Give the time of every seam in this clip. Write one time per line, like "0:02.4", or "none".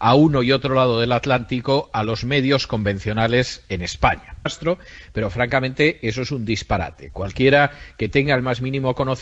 none